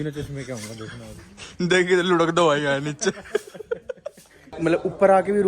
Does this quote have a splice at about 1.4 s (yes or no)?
no